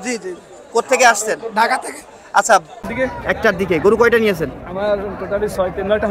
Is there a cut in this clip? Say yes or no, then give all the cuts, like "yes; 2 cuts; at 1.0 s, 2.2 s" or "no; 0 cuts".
yes; 1 cut; at 2.8 s